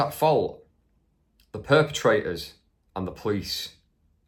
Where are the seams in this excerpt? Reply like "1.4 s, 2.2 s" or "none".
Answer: none

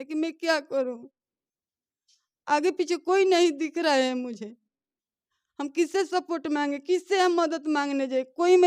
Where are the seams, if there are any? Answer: none

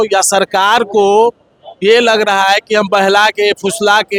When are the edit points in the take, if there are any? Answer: none

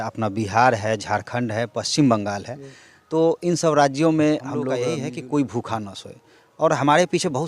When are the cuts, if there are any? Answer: 4.9 s

